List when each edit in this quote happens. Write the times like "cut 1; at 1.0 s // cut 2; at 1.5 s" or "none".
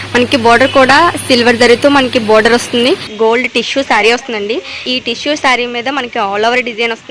cut 1; at 3.1 s // cut 2; at 4.8 s